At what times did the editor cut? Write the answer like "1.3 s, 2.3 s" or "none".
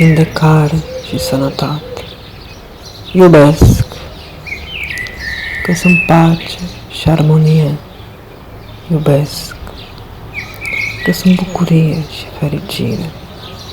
9.7 s, 11.0 s